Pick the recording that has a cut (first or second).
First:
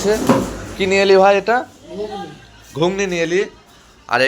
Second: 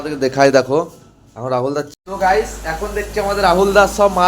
second